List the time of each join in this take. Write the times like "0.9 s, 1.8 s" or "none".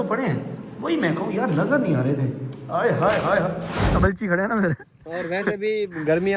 3.8 s